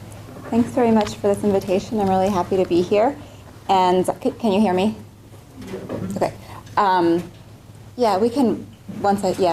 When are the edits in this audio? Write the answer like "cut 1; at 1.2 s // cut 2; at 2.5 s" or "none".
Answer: none